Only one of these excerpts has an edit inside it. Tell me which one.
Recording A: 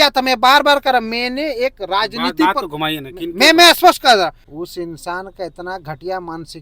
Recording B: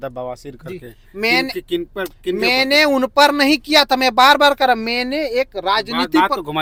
A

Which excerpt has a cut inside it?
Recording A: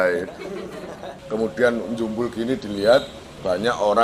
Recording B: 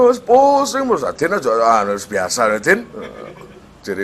A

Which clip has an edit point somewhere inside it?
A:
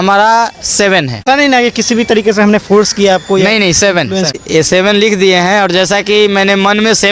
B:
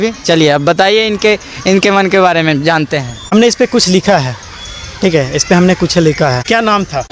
A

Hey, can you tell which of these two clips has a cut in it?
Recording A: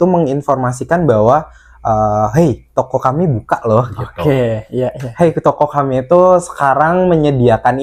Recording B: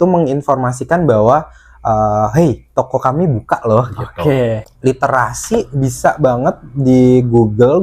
B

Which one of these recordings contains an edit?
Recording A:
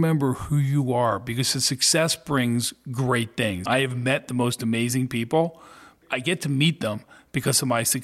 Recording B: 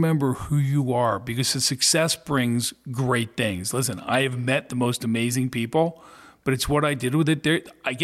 A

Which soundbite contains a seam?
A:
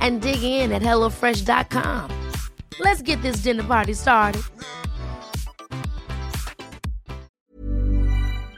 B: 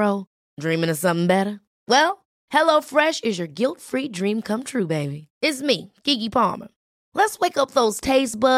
A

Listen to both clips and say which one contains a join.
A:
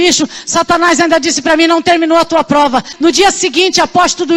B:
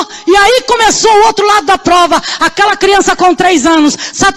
A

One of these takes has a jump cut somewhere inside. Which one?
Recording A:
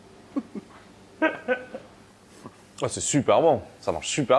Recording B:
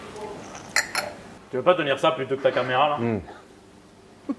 B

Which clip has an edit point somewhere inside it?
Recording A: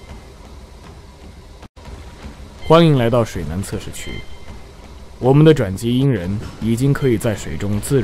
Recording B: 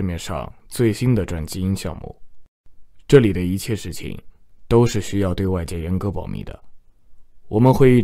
A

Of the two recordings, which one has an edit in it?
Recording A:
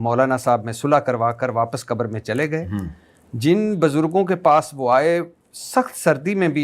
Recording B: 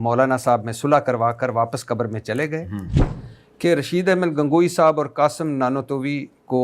B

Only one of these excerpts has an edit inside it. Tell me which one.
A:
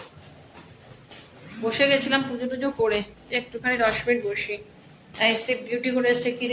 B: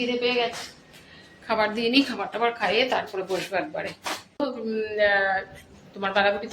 B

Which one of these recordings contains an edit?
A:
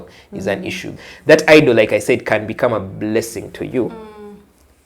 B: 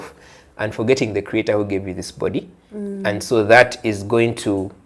A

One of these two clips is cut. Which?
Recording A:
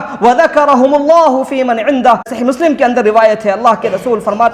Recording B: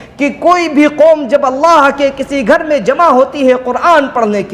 A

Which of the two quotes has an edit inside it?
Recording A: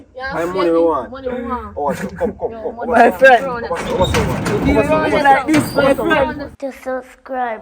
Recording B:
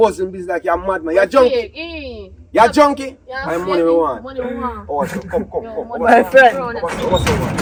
A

